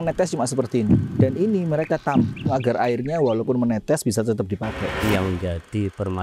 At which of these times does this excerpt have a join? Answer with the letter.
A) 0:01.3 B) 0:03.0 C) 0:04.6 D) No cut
D